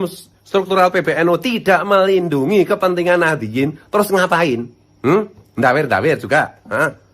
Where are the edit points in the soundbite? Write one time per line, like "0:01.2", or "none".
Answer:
none

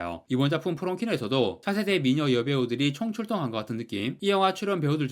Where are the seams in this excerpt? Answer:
0:04.2

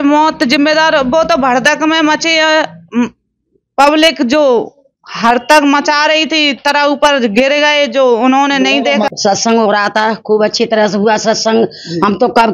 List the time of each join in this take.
none

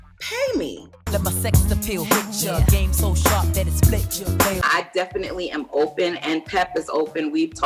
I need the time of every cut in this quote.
0:00.9
0:04.6

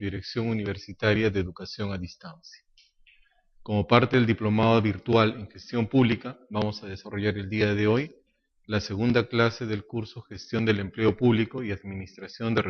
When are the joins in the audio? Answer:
none

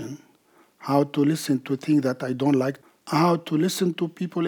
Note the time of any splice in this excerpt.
0:02.8

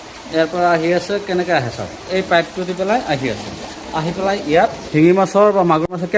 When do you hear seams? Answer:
0:04.8

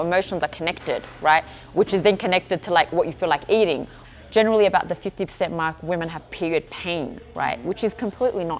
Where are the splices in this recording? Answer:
0:04.0

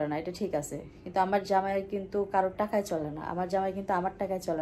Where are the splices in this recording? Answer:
none

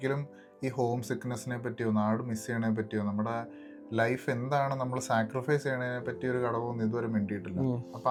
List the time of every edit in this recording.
none

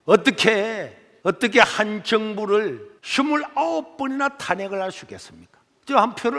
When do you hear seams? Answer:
none

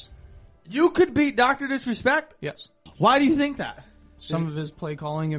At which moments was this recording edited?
0:02.9

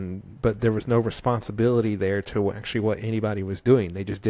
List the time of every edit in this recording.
none

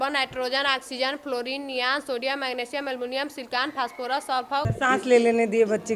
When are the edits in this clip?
0:04.7

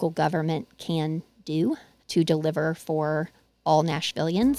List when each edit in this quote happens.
0:01.9

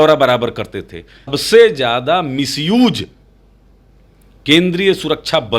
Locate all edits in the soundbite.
0:01.4

